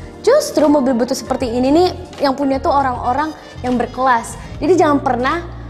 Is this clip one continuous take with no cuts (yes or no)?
no